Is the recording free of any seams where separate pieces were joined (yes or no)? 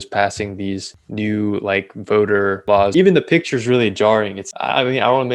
no